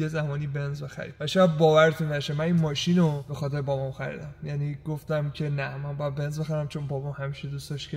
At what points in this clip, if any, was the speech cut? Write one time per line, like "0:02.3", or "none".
none